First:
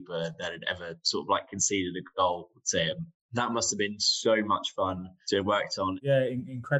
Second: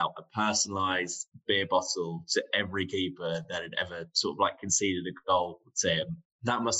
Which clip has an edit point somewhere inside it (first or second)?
first